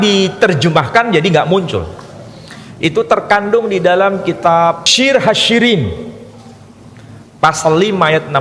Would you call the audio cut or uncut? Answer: cut